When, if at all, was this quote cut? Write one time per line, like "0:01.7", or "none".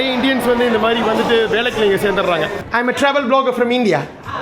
0:02.6